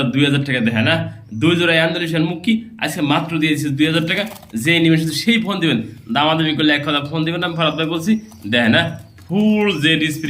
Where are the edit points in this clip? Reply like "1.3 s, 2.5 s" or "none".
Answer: none